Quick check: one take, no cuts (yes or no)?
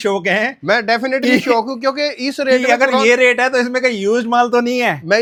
yes